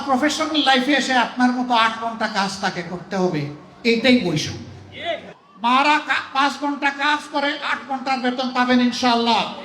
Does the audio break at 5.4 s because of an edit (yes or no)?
yes